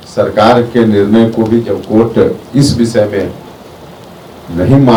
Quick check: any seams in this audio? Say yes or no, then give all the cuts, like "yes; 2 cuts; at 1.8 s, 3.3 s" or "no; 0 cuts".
no; 0 cuts